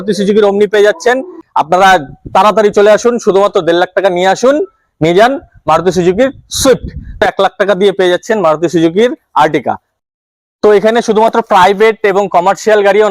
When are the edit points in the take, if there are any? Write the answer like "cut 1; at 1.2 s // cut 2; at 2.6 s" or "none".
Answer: cut 1; at 1.4 s // cut 2; at 7.2 s // cut 3; at 9.9 s